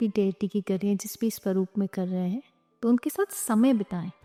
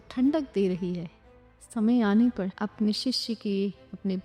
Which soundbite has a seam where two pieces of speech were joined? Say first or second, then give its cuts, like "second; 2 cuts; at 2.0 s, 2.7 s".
second; 1 cut; at 2.5 s